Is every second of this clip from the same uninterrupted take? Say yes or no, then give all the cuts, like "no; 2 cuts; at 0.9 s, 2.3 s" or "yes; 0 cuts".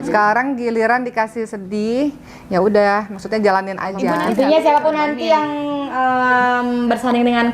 no; 1 cut; at 4.3 s